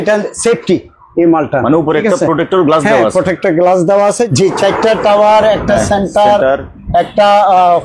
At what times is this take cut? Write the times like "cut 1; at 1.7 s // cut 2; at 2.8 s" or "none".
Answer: cut 1; at 4.1 s